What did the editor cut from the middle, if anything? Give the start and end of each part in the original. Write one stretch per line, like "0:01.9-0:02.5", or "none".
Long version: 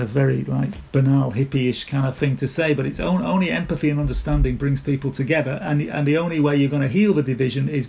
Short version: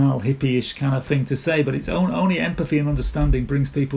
none